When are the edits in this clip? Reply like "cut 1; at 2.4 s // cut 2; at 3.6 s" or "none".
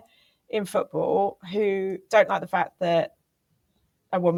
none